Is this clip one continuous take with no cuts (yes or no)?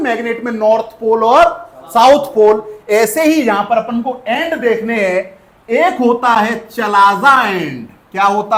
yes